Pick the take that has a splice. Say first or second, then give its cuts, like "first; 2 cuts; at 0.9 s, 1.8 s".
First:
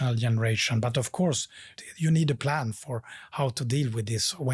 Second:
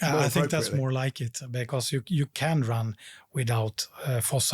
first; 1 cut; at 1.7 s